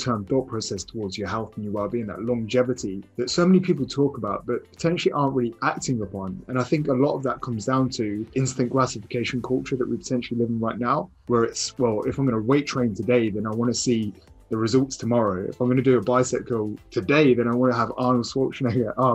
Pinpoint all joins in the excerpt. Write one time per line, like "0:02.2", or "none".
0:03.0
0:04.7
0:08.3
0:11.1